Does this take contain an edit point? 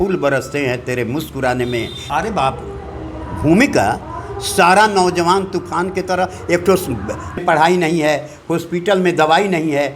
yes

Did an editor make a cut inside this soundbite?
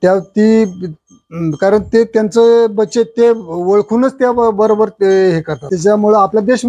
yes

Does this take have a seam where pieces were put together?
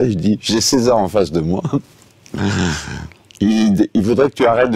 no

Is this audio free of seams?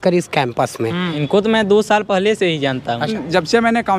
no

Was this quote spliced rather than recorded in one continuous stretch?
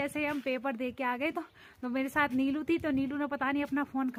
no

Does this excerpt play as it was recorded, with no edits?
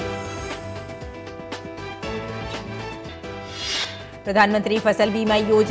no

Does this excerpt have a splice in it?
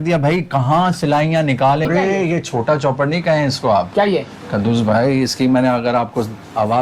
yes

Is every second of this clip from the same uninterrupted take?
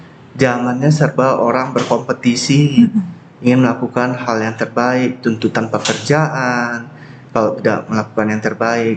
yes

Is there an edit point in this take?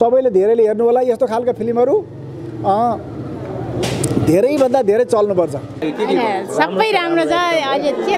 yes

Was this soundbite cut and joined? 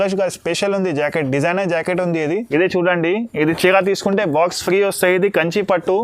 yes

